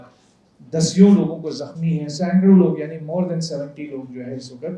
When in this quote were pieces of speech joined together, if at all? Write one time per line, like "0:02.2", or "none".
none